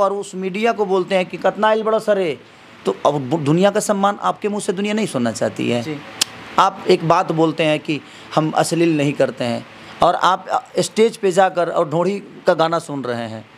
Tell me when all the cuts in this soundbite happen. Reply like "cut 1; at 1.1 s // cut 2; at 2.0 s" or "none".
none